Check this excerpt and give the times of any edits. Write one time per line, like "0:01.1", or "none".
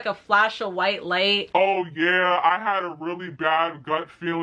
0:01.5